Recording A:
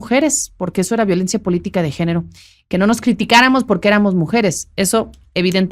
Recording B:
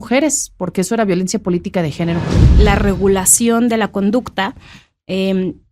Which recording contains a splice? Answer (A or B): B